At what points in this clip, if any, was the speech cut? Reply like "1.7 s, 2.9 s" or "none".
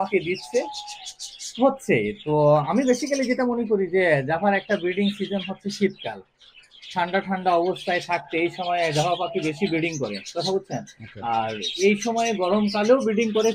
none